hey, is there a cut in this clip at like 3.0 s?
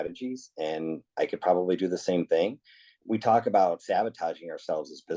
yes; 1 cut; at 3.0 s

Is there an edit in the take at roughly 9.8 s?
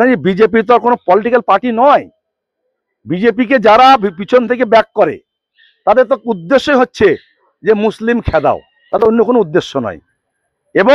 no; 0 cuts

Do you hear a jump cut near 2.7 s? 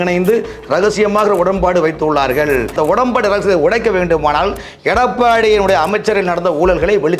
yes; 1 cut; at 2.7 s

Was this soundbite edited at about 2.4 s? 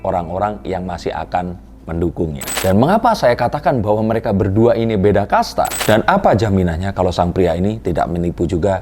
yes; 2 cuts; at 2.4 s, 5.8 s

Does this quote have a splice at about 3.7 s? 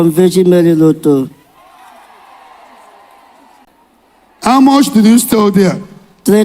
yes; 1 cut; at 3.7 s

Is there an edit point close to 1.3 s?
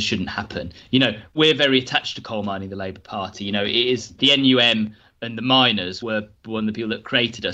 yes; 2 cuts; at 1.3 s, 4.2 s

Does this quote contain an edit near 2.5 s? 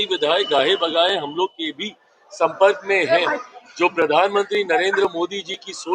no; 0 cuts

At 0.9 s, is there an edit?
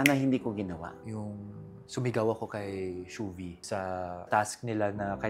yes; 1 cut; at 0.9 s

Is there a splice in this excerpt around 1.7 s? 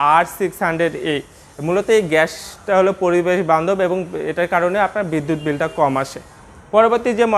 no; 0 cuts

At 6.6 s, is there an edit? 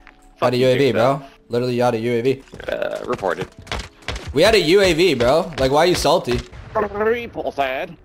yes; 2 cuts; at 2.5 s, 6.6 s

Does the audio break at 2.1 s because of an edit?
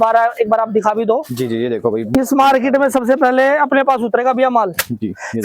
yes; 1 cut; at 2.1 s

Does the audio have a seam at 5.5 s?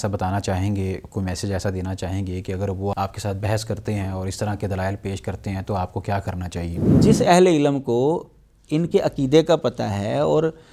no; 2 cuts; at 2.9 s, 6.9 s

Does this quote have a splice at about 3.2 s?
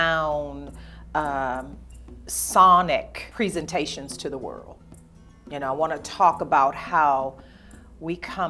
yes; 1 cut; at 3.2 s

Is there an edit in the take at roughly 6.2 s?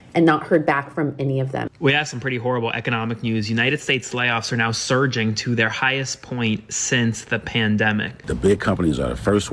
no; 2 cuts; at 1.7 s, 8.2 s

